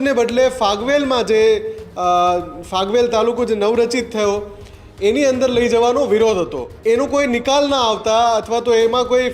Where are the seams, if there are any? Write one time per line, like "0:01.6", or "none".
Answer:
0:06.7